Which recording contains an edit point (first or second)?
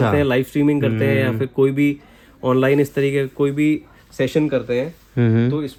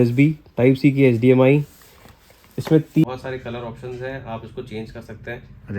second